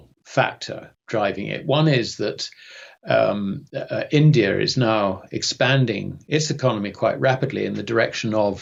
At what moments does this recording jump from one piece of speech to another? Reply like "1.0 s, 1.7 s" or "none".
none